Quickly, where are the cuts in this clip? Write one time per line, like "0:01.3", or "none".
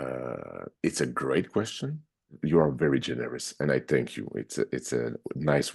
0:02.4